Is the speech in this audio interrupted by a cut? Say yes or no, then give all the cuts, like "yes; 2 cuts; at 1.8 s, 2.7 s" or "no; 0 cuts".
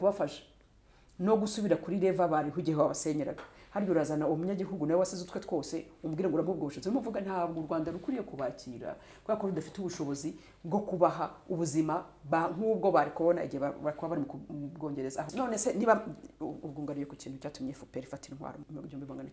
yes; 1 cut; at 15.3 s